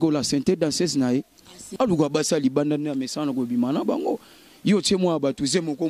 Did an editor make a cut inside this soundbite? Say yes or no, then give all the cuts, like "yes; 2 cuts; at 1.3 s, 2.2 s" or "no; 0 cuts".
yes; 1 cut; at 1.6 s